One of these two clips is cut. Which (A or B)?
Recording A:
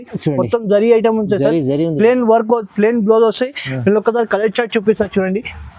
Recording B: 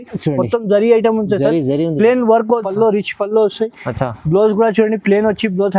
B